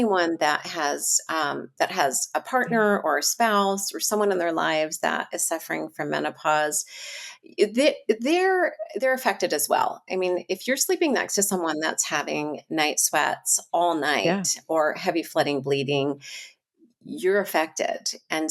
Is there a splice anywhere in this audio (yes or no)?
no